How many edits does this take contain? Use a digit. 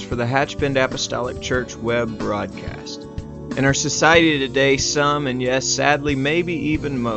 0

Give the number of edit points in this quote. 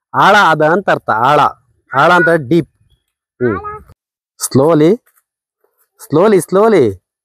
1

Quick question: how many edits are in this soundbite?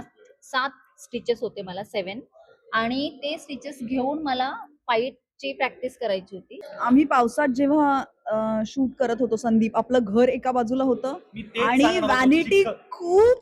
1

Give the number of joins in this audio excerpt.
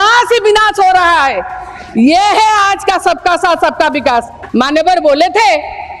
1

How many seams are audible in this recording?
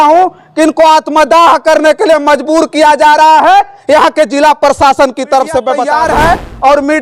1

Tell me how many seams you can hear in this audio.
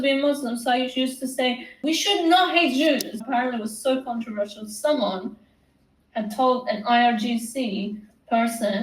2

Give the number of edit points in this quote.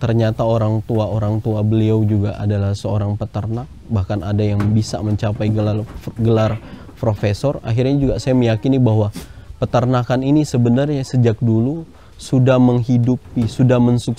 0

